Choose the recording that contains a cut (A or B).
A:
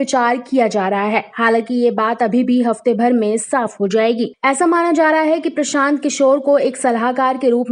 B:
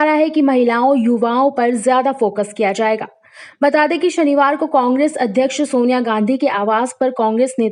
A